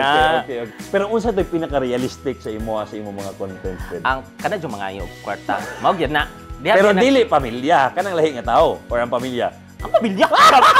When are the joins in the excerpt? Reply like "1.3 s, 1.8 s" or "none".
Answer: none